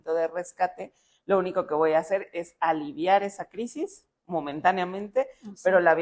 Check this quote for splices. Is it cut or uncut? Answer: uncut